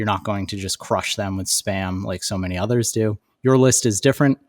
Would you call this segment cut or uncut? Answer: cut